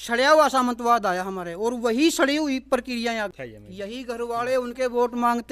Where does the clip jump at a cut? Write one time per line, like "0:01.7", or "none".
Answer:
0:03.3